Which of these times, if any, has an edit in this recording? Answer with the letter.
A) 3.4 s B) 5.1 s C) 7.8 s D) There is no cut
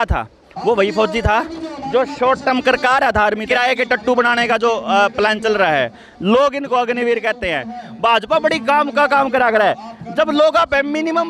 A